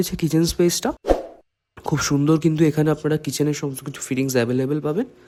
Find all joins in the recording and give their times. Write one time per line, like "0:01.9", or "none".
none